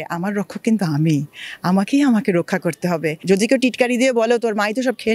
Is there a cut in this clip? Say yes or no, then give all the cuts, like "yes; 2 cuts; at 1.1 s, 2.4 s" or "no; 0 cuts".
yes; 1 cut; at 3.2 s